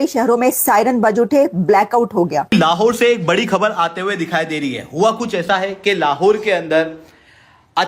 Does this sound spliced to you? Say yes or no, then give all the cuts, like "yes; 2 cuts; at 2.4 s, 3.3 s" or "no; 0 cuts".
yes; 1 cut; at 2.5 s